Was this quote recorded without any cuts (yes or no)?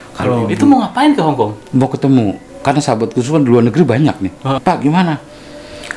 no